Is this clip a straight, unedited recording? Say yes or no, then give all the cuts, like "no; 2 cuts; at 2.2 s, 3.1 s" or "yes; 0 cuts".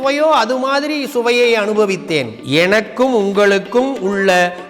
no; 1 cut; at 2.4 s